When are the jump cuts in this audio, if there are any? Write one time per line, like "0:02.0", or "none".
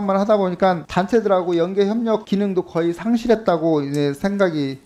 none